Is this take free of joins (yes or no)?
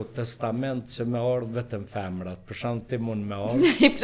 yes